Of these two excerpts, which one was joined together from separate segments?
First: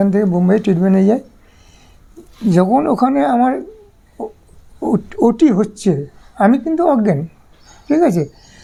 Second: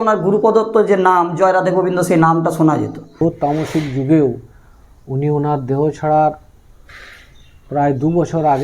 second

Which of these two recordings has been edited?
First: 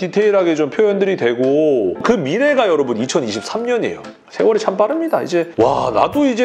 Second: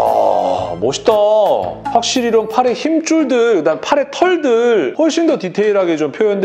first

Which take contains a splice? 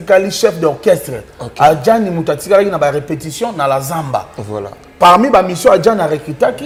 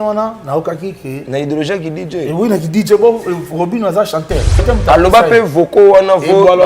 second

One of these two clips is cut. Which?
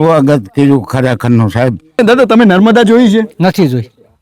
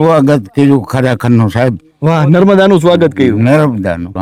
first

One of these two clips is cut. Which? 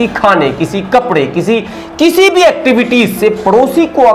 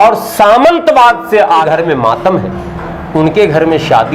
second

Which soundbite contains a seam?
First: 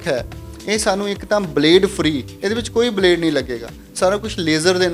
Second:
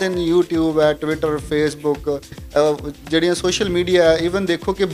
first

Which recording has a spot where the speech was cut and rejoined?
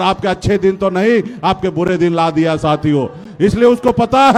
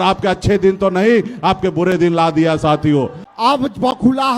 second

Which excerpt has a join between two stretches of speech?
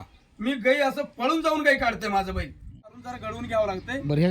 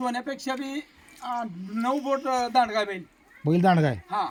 first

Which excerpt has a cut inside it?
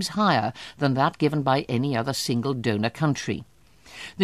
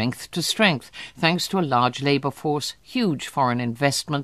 second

